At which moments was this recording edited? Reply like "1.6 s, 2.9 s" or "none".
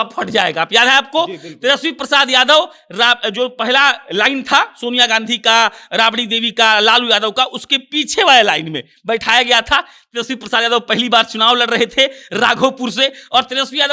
none